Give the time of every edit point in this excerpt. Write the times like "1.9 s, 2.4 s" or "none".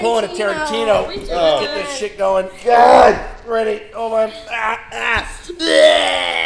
none